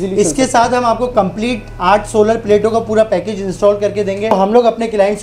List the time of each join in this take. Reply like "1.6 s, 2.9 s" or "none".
4.3 s